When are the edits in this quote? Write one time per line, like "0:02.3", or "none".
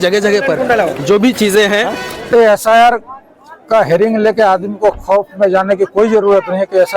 0:02.1